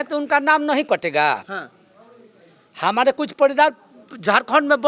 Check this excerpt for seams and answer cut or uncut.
uncut